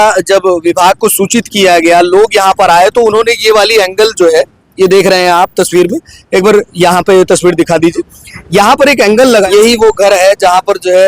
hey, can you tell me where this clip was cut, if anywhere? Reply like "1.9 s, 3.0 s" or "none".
9.5 s